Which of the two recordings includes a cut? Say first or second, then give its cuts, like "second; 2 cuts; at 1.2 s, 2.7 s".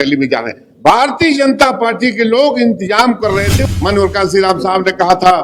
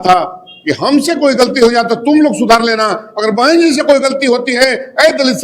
first; 1 cut; at 3.5 s